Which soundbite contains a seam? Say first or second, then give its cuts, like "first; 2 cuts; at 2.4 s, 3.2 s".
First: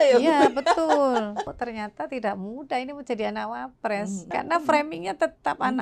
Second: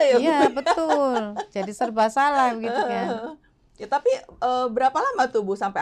first; 2 cuts; at 1.5 s, 4.3 s